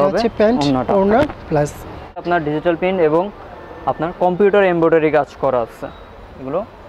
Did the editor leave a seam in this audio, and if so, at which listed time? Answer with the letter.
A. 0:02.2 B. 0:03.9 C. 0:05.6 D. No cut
A